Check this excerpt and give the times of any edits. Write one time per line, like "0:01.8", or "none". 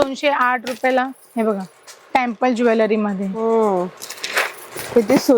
none

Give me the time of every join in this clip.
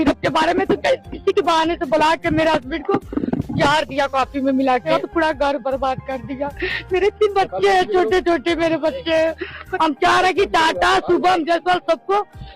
0:04.9
0:09.6

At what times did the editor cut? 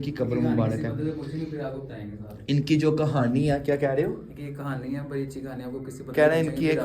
none

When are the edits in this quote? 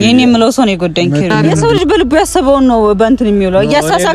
0:01.5

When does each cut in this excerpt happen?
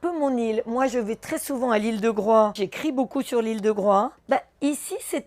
0:02.7
0:04.2

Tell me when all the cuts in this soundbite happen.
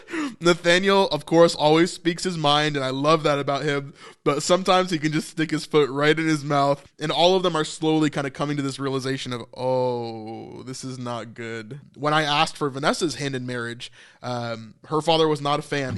0:06.9
0:11.7

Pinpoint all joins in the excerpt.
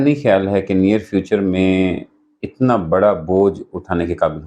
none

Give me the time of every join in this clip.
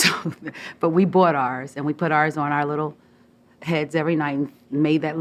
0:01.1

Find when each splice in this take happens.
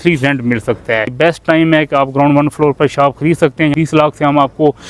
0:01.1
0:03.7

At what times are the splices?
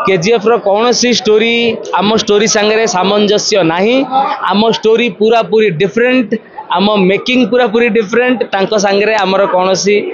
none

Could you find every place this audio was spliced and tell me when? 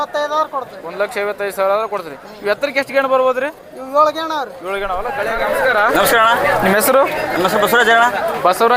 0:05.3

